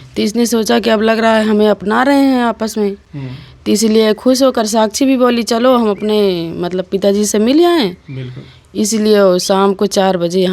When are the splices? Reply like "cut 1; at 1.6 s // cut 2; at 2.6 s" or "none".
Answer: none